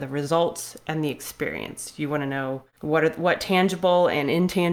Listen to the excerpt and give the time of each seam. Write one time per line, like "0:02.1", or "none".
0:02.7